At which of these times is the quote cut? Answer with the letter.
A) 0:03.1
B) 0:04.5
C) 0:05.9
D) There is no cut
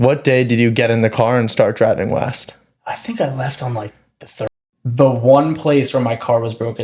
B